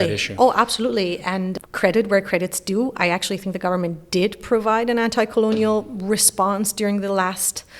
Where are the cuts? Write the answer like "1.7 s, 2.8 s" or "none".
1.5 s